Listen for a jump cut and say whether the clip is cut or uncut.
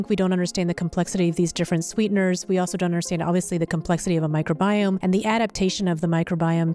cut